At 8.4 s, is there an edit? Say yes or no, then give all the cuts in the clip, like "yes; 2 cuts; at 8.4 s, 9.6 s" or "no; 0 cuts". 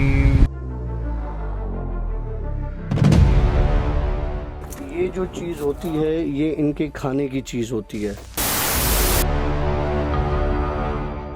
no; 0 cuts